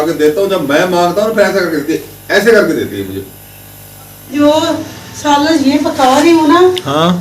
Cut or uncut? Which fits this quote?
cut